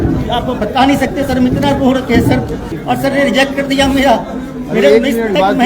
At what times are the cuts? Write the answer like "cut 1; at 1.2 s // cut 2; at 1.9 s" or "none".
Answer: cut 1; at 2.7 s